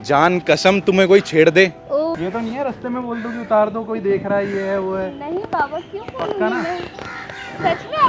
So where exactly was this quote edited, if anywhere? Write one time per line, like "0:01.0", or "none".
0:02.2